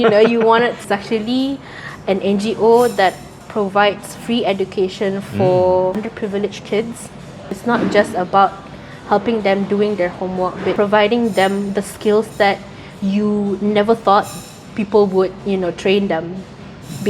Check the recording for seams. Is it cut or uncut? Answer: cut